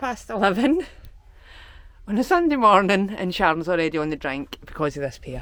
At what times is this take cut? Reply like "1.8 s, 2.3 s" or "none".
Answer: none